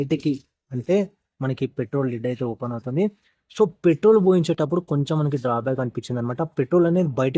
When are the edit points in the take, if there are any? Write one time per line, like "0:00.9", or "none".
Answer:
none